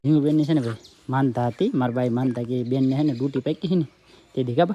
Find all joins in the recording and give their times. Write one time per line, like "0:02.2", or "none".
none